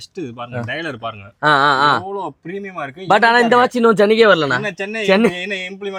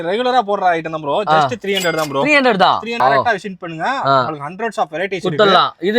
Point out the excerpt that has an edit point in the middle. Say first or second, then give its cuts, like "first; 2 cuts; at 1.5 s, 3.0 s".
second; 1 cut; at 3.0 s